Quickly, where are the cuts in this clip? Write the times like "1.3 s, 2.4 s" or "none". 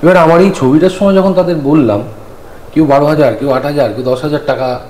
none

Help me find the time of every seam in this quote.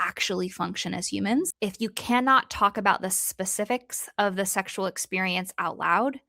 1.5 s

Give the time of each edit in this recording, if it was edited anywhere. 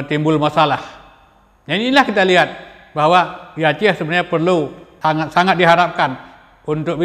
4.8 s

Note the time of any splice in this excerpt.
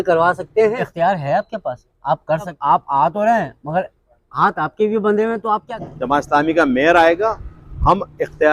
0.8 s, 2.5 s, 5.7 s

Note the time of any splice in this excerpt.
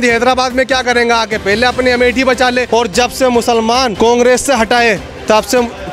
2.7 s, 3.9 s

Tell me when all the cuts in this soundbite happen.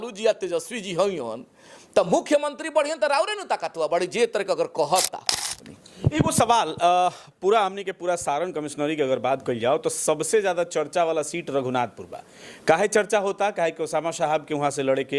5.6 s

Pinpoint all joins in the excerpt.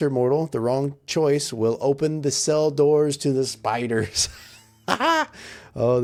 none

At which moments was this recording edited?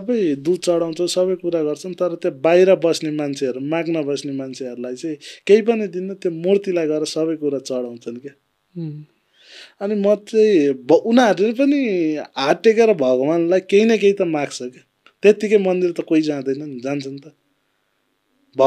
none

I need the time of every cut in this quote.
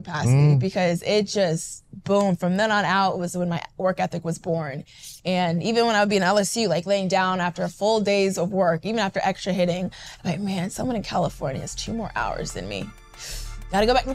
none

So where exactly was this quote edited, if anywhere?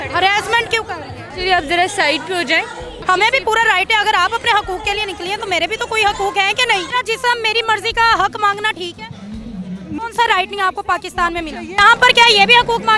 2.9 s, 6.9 s, 10.0 s, 11.7 s

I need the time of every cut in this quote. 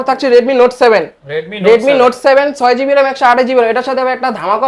none

